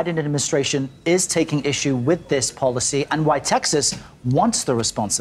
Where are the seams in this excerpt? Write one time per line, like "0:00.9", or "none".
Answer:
none